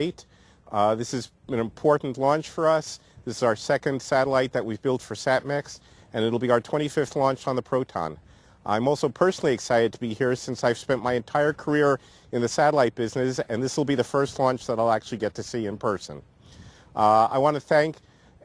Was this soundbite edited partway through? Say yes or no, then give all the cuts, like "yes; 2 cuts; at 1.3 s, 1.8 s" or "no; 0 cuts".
yes; 1 cut; at 15.5 s